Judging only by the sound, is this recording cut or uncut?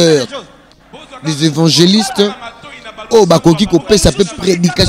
uncut